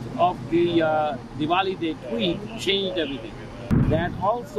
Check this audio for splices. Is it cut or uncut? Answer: cut